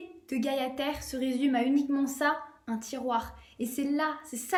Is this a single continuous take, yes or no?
yes